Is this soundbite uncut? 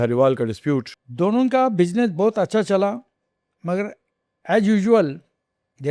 no; 1 cut; at 1.0 s

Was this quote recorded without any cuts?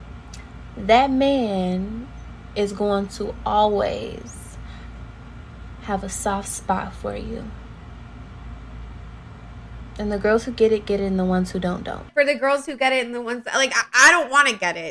no; 1 cut; at 12.1 s

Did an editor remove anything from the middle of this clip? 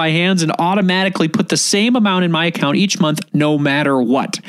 no; 0 cuts

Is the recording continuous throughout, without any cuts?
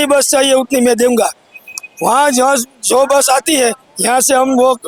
yes; 0 cuts

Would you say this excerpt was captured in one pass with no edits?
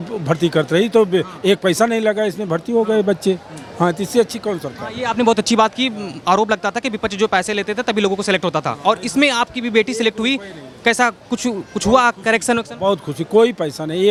yes; 0 cuts

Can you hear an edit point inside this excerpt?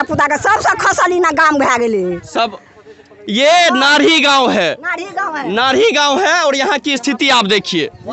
no; 0 cuts

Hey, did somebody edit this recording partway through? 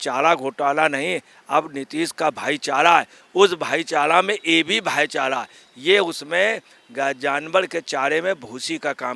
no; 0 cuts

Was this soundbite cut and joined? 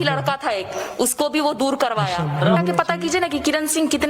yes; 1 cut; at 2.6 s

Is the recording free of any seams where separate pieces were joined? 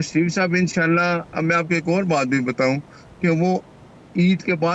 yes; 0 cuts

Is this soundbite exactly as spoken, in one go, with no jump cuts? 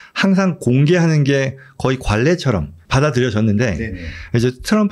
no; 1 cut; at 2.8 s

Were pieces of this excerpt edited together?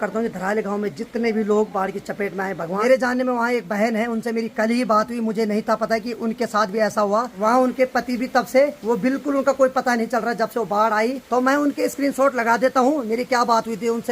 yes; 4 cuts; at 2.8 s, 7.3 s, 8.8 s, 11.2 s

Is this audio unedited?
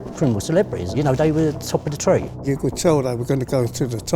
no; 1 cut; at 2.4 s

